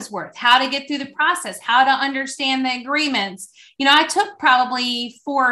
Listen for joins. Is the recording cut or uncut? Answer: uncut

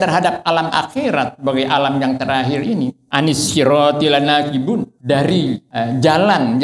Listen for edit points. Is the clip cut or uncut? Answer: cut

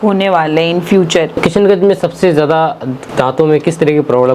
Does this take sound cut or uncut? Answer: cut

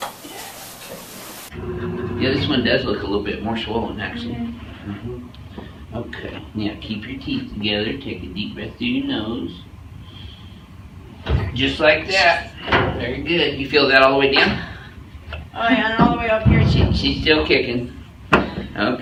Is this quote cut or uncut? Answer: uncut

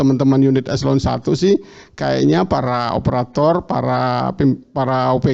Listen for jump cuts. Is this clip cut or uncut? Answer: uncut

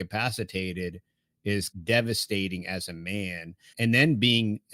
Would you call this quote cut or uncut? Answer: cut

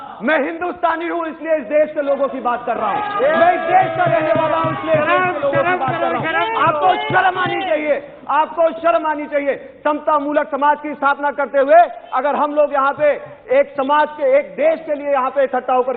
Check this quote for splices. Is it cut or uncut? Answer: uncut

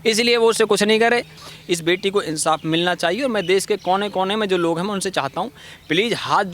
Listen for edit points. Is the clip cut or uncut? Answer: cut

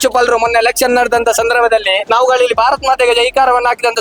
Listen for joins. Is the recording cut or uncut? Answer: cut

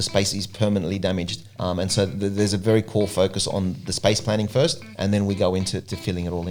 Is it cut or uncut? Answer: uncut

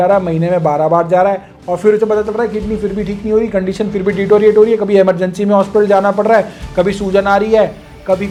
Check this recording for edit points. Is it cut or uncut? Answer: uncut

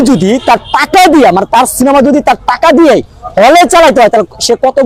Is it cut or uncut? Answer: uncut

